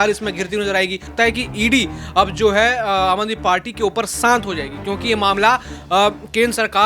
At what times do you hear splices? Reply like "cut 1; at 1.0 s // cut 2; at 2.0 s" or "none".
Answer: cut 1; at 1.1 s